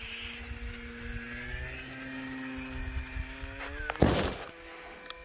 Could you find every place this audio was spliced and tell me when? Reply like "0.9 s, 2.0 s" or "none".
none